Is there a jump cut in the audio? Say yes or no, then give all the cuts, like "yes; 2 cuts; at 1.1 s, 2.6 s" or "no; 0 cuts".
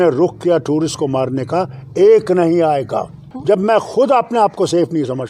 yes; 1 cut; at 3.3 s